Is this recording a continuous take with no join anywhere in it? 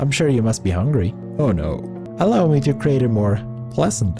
no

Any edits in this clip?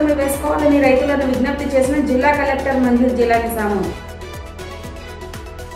no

